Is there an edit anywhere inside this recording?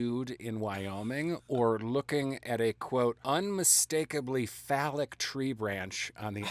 yes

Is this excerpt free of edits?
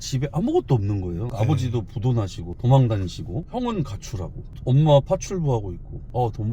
no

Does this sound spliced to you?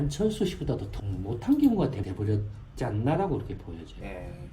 yes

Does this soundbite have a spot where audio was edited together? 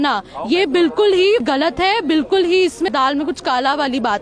yes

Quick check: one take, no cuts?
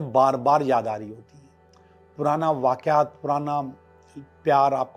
yes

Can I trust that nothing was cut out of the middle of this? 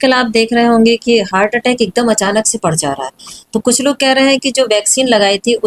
yes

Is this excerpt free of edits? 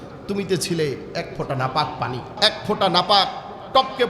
no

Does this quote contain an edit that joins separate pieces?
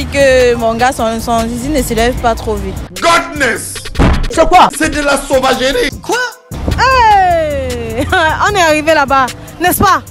no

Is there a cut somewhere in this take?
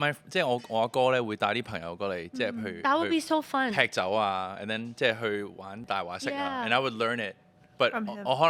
no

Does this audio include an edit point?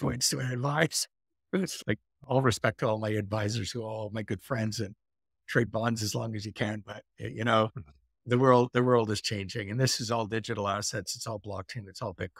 yes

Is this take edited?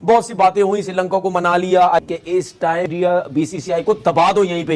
yes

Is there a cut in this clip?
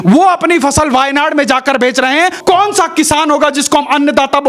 yes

